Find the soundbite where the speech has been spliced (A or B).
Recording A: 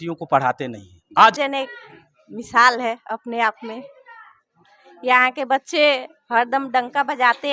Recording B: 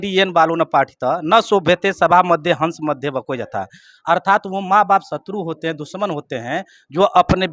A